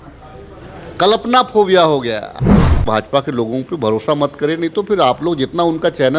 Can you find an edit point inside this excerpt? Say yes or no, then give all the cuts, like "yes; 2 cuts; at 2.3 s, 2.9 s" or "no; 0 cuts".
yes; 1 cut; at 2.5 s